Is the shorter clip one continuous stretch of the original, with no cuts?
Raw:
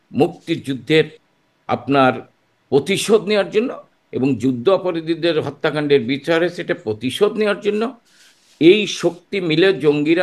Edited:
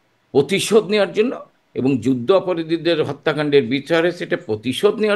yes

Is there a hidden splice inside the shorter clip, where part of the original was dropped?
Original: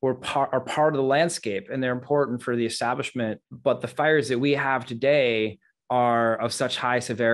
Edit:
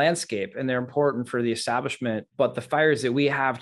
yes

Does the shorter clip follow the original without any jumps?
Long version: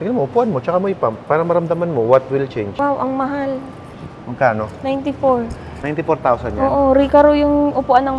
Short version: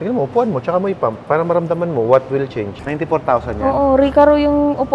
no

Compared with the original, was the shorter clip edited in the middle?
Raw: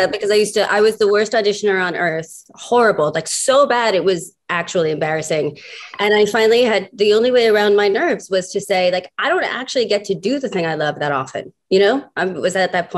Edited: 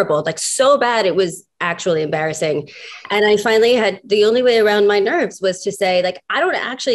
no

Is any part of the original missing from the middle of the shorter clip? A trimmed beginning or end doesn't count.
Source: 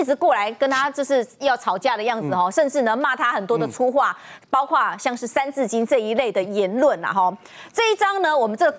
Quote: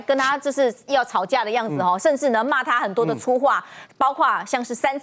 no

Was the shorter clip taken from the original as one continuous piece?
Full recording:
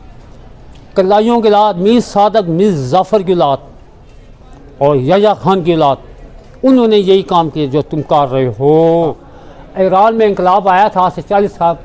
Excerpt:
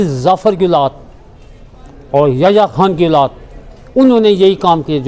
yes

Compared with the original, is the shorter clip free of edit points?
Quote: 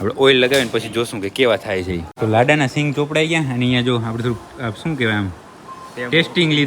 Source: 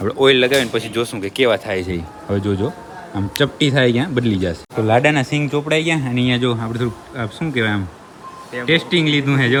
no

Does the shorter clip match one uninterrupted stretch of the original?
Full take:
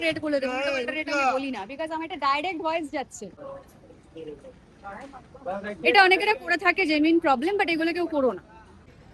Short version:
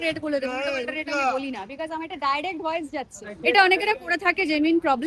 no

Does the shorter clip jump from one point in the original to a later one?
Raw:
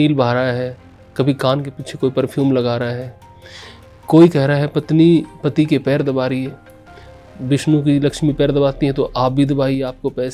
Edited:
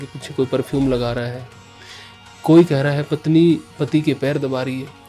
no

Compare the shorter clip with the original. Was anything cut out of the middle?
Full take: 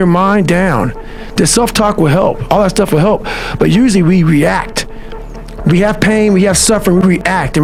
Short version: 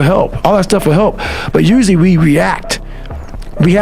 no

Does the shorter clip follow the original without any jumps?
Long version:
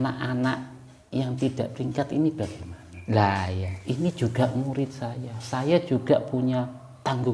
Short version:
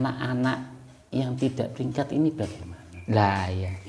yes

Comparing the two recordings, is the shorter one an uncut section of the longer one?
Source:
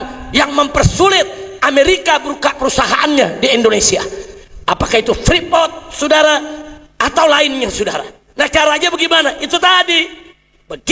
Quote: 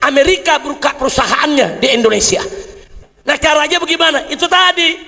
no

